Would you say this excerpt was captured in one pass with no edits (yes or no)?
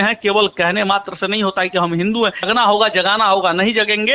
no